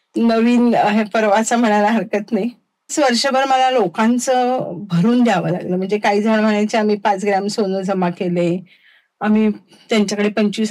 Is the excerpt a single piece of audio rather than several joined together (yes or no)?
no